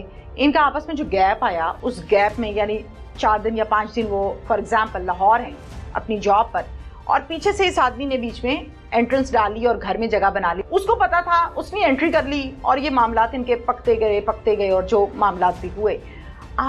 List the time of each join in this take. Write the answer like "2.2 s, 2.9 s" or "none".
10.6 s